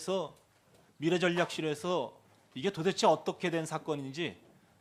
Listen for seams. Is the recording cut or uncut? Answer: uncut